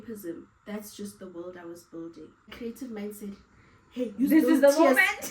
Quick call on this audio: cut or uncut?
cut